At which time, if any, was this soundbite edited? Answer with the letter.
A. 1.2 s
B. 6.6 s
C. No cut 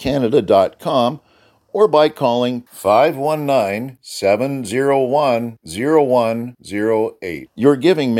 C